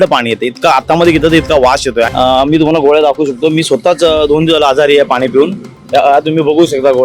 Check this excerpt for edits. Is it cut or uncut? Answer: cut